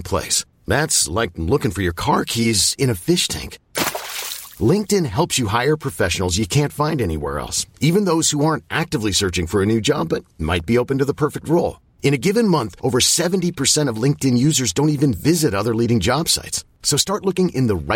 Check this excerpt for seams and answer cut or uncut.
uncut